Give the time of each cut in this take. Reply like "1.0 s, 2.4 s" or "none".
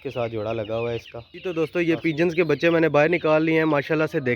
1.5 s